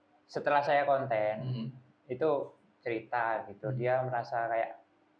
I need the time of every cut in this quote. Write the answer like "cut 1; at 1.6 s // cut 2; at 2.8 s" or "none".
none

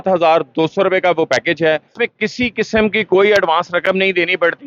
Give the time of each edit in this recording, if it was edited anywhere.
cut 1; at 1.9 s

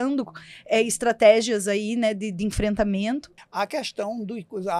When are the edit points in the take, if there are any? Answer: cut 1; at 3.4 s

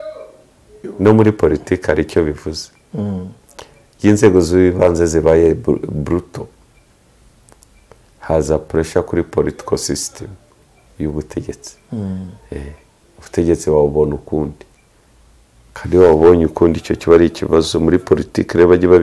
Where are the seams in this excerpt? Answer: cut 1; at 0.9 s

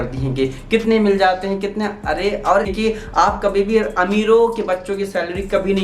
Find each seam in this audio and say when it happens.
cut 1; at 2.7 s

